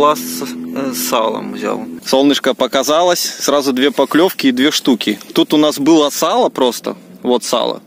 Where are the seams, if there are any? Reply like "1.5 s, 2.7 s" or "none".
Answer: 1.9 s